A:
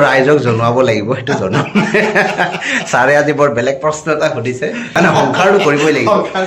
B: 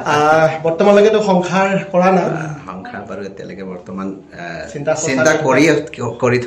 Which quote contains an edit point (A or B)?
A